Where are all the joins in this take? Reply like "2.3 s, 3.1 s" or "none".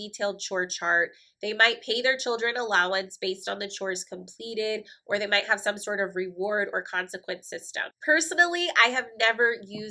none